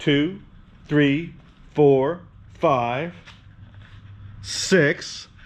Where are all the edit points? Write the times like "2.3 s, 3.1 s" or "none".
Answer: none